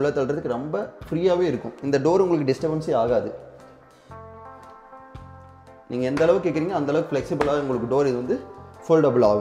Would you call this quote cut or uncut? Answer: uncut